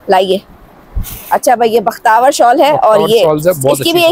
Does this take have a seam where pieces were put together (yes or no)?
no